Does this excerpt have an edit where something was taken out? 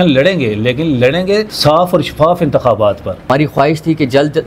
yes; 2 cuts; at 1.5 s, 3.3 s

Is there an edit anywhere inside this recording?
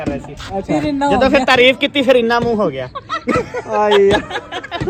no; 0 cuts

